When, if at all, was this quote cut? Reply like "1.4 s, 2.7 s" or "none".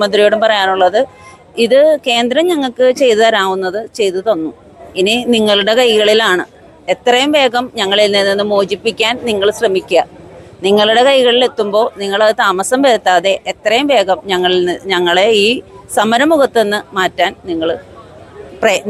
none